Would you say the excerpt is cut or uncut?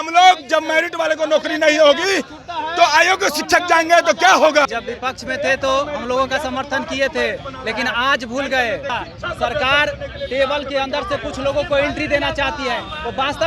cut